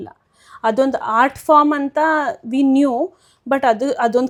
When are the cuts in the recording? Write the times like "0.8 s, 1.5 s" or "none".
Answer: none

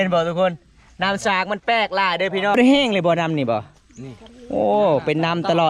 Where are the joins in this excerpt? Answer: 2.6 s

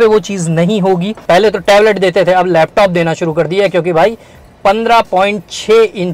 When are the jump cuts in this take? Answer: 1.1 s

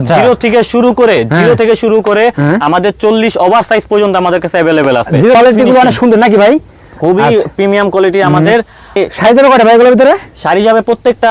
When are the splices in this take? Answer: 5.4 s, 9.0 s

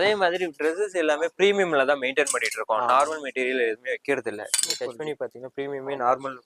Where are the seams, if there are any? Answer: none

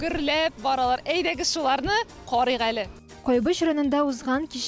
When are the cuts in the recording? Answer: 2.7 s

